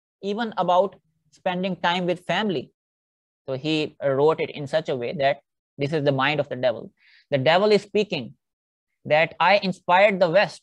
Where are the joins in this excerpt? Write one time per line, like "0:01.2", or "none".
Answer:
0:02.7

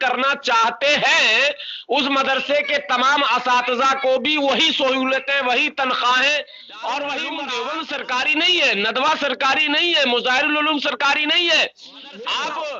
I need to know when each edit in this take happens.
0:07.4

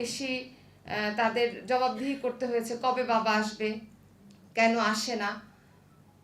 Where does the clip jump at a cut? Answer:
none

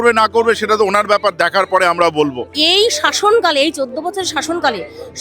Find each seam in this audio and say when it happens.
0:02.5

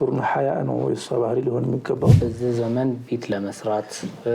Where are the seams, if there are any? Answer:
0:02.2

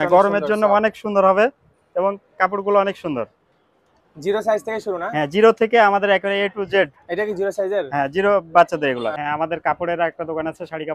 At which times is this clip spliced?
0:09.2

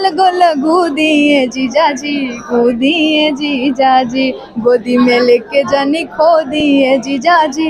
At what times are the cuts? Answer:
none

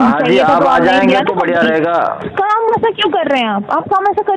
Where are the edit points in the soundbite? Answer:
0:02.2

